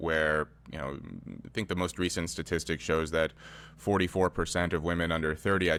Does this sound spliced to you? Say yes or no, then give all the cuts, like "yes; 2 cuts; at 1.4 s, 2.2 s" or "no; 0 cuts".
no; 0 cuts